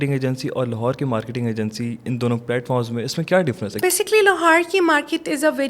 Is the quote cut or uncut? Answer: uncut